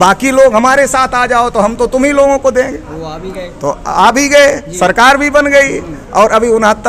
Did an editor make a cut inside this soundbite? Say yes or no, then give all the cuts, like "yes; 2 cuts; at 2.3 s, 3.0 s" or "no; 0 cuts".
no; 0 cuts